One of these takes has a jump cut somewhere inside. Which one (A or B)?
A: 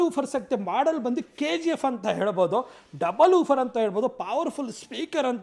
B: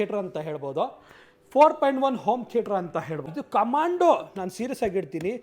B